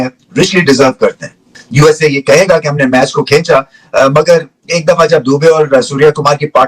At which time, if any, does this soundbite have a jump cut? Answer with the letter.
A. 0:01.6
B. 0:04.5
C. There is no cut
A